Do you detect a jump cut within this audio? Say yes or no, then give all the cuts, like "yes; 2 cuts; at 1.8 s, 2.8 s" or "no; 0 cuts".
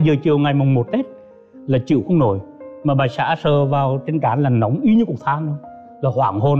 no; 0 cuts